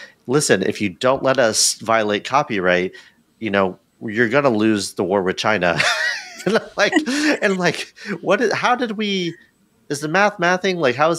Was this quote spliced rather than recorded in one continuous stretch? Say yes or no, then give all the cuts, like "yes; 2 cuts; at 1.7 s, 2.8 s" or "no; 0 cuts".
no; 0 cuts